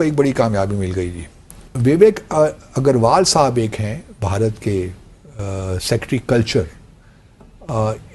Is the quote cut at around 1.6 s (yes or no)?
yes